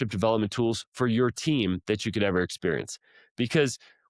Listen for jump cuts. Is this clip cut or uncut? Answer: uncut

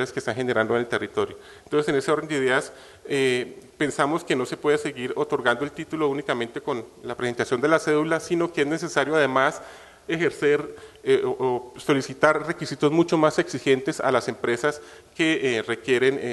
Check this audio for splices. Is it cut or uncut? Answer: cut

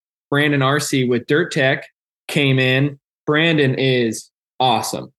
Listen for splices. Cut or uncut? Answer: cut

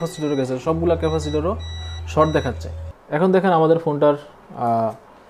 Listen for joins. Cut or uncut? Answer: cut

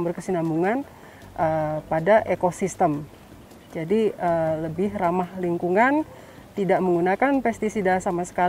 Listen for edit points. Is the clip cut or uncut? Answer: uncut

